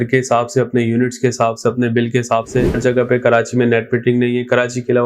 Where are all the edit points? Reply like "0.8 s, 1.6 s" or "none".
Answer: 2.7 s